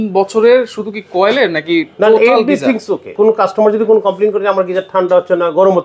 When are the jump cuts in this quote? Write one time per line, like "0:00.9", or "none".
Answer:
0:03.1